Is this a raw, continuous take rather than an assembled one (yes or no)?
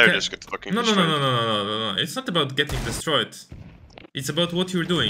yes